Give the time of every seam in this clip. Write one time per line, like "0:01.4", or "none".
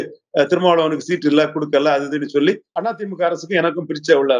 0:02.7